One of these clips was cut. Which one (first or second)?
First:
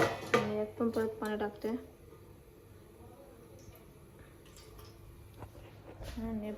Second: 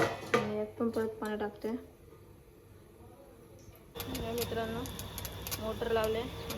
second